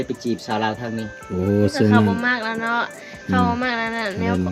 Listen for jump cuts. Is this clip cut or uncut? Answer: uncut